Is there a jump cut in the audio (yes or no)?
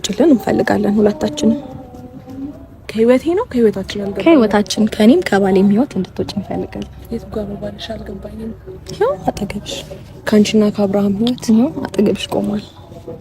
yes